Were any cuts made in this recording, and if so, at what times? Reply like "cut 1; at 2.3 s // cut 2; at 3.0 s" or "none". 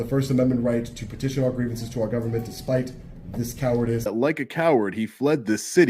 cut 1; at 4.1 s